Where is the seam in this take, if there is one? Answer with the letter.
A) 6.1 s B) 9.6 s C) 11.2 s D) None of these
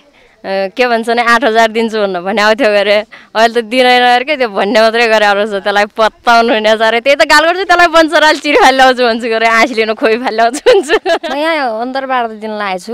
C